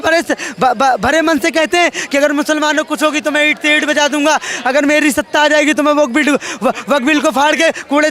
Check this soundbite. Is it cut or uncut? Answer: uncut